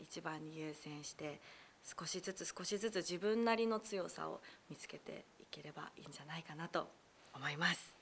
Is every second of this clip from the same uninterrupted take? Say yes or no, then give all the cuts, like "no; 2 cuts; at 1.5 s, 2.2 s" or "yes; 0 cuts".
yes; 0 cuts